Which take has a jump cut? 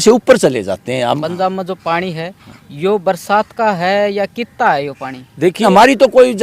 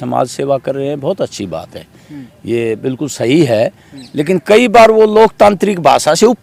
first; 2 cuts; at 1.2 s, 5.6 s

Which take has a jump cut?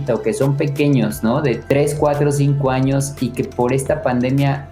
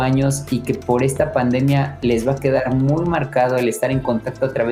first; 1 cut; at 1.6 s

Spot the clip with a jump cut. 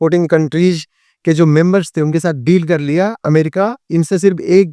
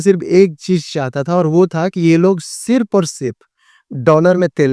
first; 1 cut; at 3.2 s

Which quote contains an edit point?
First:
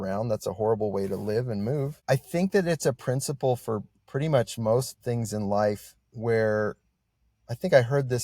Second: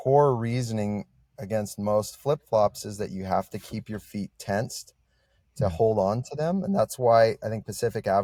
first; 1 cut; at 1.9 s

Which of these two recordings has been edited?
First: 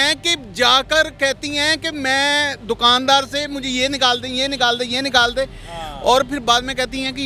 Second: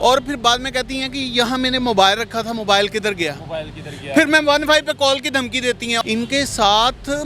second; 1 cut; at 6.0 s

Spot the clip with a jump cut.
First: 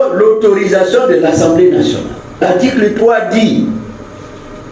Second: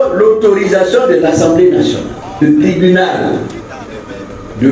second; 1 cut; at 2.4 s

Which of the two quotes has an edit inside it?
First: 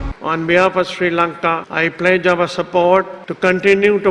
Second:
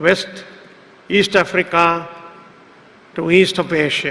first; 2 cuts; at 1.7 s, 3.2 s

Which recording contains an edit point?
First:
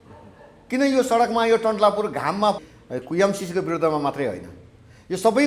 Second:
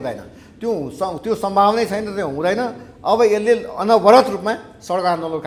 first; 1 cut; at 2.7 s

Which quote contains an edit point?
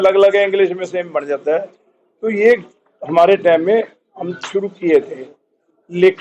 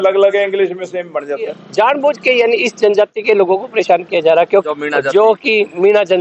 second; 2 cuts; at 1.5 s, 4.7 s

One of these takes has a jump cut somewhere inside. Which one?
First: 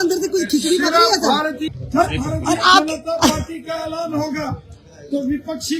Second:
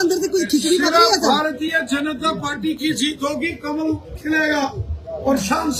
first; 1 cut; at 1.8 s

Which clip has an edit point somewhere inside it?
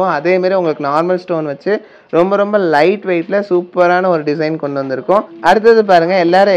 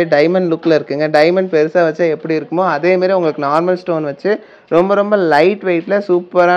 first; 1 cut; at 5.3 s

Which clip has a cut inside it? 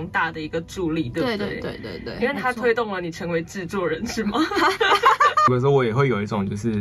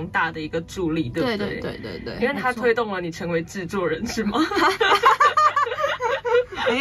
first; 1 cut; at 5.5 s

